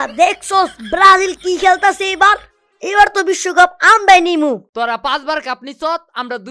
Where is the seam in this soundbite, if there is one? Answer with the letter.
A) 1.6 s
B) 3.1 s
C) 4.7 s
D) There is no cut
C